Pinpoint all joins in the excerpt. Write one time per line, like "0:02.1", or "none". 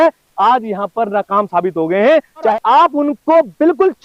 0:02.5